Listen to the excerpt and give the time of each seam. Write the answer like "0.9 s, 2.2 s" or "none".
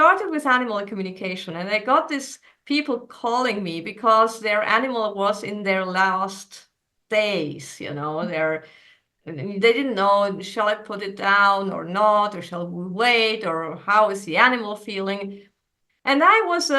none